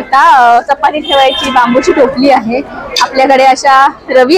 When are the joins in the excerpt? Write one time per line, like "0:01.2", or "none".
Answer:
none